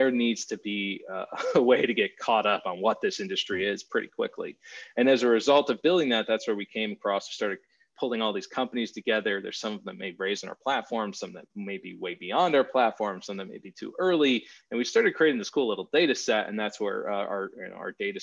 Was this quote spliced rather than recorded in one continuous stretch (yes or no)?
no